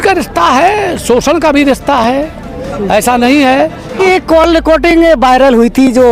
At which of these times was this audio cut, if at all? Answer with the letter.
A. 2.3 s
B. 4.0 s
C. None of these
B